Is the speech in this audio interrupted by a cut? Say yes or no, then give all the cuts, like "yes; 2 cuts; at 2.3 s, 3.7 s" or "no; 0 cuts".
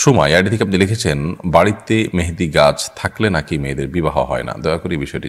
no; 0 cuts